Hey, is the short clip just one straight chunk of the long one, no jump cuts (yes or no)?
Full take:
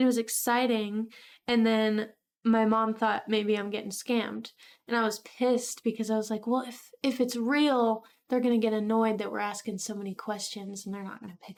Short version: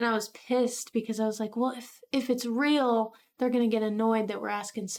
yes